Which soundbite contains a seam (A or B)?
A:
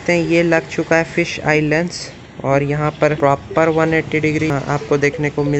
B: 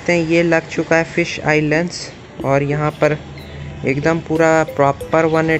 A